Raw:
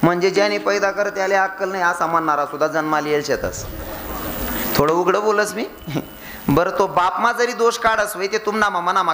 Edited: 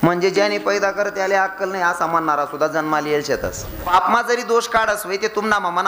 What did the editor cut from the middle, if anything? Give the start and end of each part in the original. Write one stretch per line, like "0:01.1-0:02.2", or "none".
0:03.9-0:07.0